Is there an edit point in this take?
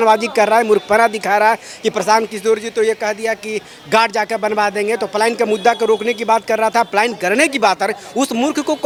no; 0 cuts

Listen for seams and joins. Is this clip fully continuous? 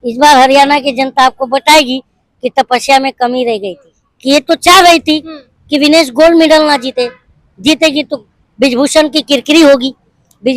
yes; 0 cuts

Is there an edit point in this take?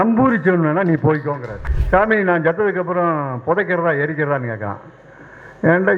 yes; 1 cut; at 1.7 s

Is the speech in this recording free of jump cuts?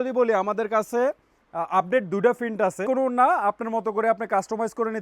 no; 1 cut; at 2.8 s

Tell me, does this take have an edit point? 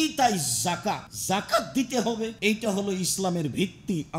yes; 2 cuts; at 1.1 s, 2.3 s

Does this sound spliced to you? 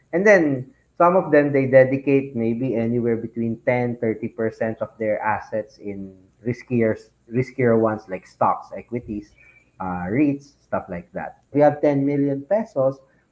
yes; 1 cut; at 11.5 s

